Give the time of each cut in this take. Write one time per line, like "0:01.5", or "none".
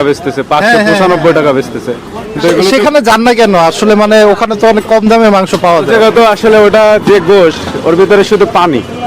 none